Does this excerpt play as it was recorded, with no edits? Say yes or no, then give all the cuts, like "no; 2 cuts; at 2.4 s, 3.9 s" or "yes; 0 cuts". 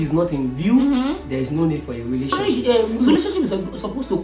no; 1 cut; at 2.4 s